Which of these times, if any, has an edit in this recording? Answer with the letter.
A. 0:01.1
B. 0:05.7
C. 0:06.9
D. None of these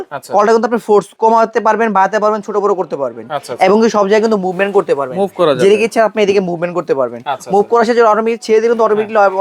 A